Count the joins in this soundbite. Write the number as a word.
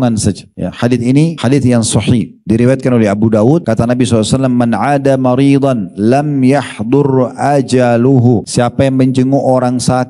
two